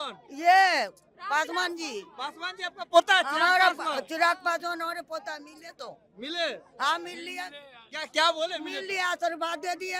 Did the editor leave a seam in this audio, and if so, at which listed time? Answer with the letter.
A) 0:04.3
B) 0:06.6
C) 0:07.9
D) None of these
D